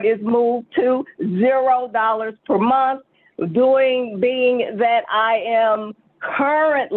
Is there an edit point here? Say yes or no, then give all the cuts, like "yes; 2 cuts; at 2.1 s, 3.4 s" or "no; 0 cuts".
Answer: no; 0 cuts